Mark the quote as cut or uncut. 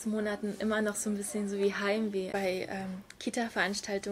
cut